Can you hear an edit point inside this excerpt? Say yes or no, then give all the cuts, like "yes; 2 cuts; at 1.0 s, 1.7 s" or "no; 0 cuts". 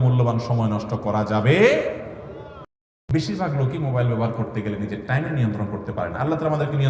yes; 1 cut; at 2.7 s